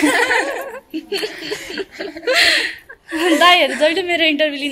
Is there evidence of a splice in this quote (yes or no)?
no